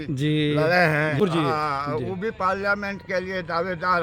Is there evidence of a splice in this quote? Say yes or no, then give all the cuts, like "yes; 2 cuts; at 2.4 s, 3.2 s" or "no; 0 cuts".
yes; 1 cut; at 1.2 s